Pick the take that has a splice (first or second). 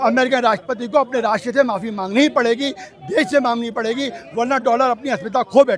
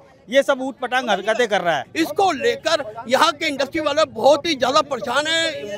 second